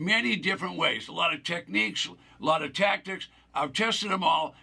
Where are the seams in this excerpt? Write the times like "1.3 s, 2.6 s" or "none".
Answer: none